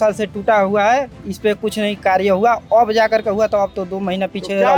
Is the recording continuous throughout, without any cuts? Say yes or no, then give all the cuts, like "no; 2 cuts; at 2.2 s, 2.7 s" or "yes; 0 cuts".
yes; 0 cuts